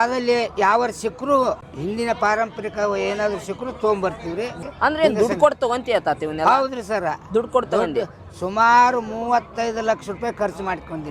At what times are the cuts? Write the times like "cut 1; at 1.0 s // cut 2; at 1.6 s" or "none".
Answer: cut 1; at 4.6 s